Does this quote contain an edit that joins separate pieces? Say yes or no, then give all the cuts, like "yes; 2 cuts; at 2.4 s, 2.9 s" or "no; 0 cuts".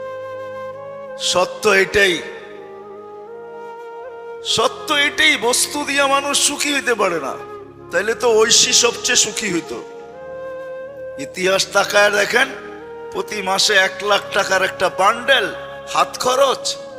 no; 0 cuts